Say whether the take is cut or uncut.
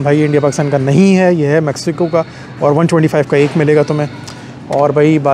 uncut